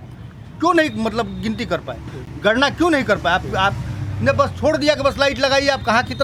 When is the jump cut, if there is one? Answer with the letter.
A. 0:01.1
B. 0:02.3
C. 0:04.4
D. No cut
D